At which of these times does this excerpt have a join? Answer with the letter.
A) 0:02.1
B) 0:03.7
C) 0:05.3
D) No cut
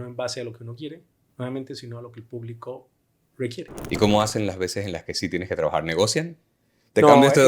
B